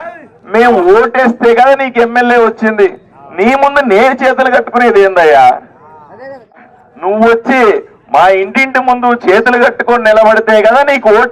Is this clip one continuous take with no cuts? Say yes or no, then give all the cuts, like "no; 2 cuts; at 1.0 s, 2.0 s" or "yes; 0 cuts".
no; 1 cut; at 6.5 s